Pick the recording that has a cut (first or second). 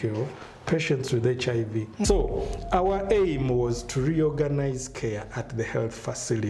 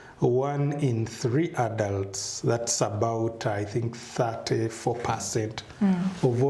first